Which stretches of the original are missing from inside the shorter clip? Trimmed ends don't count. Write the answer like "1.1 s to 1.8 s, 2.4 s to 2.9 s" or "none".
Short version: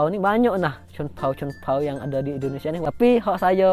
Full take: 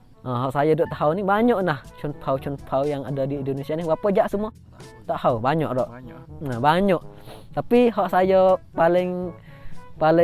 3.8 s to 7.5 s